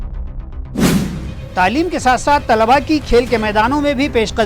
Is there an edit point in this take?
yes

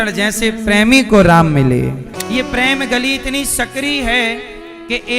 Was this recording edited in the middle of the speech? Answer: yes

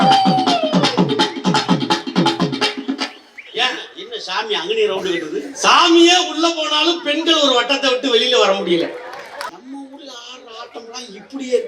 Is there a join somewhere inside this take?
yes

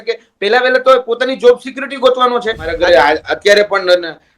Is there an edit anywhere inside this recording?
yes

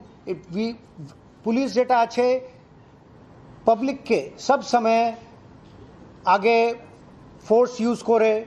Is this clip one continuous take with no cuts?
yes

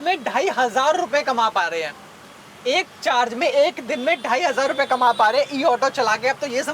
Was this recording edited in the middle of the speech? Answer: no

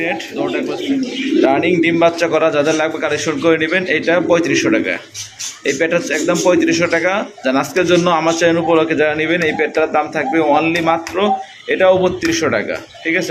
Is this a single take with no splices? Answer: yes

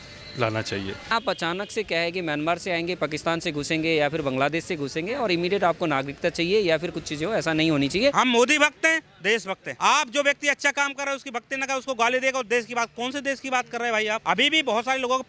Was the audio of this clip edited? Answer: yes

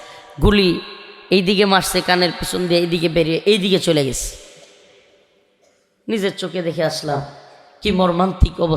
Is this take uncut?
yes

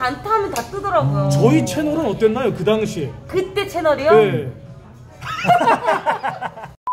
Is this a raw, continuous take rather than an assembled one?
yes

